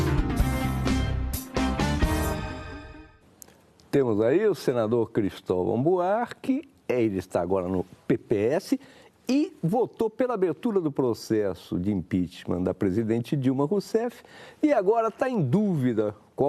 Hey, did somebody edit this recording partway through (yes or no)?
yes